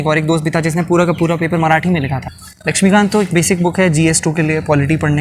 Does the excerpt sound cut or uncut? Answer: cut